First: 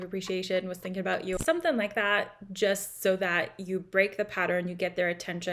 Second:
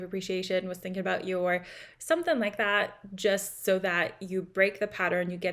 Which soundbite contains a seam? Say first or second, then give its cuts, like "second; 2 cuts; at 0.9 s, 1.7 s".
first; 1 cut; at 1.4 s